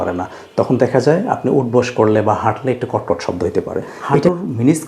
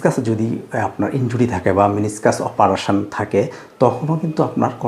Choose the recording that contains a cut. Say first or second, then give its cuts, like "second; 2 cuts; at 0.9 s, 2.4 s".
first; 1 cut; at 3.9 s